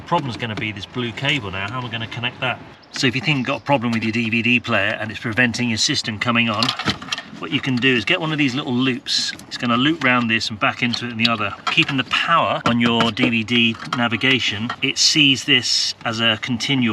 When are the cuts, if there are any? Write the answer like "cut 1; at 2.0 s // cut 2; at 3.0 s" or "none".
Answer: cut 1; at 2.9 s // cut 2; at 9.4 s // cut 3; at 11.6 s // cut 4; at 12.6 s // cut 5; at 14.8 s